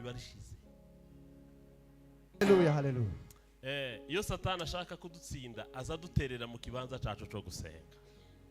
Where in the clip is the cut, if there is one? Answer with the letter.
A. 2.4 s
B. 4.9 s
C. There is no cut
A